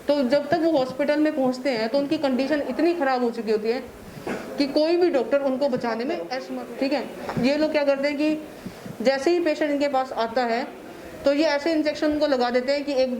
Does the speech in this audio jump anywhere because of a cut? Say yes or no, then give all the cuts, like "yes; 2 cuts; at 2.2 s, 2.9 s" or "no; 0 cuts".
yes; 1 cut; at 6.4 s